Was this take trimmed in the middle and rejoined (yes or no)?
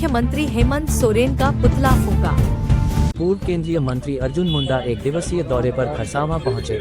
yes